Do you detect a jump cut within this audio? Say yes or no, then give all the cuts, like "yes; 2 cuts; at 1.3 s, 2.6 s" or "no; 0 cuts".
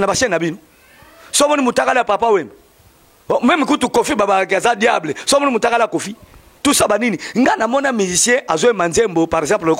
yes; 1 cut; at 6.5 s